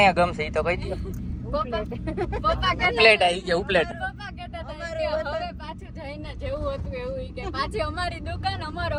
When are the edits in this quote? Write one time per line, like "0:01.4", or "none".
none